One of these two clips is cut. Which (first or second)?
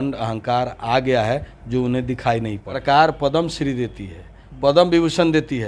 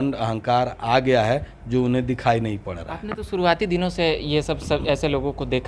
first